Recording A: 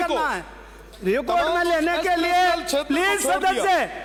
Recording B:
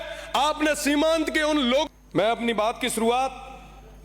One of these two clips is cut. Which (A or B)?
B